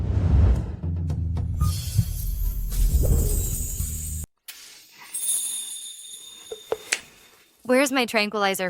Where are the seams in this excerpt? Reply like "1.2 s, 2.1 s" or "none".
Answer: 4.3 s

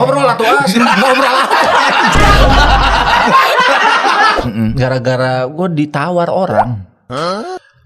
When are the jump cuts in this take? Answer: 4.4 s

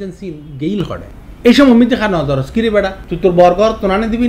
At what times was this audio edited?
3.0 s

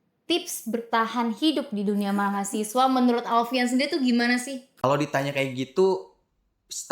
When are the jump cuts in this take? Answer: 4.6 s

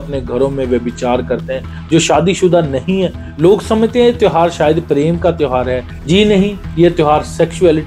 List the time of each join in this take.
none

